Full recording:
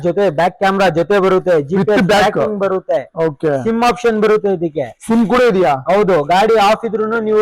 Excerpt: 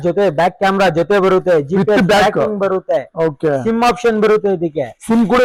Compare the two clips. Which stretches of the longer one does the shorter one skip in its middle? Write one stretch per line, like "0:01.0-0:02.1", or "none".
none